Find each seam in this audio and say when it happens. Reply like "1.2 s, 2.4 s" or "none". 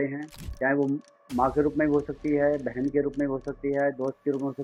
none